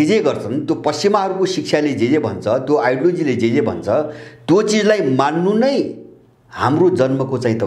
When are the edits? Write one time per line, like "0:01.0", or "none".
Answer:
none